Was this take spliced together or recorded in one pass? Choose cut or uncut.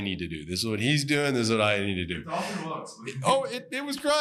uncut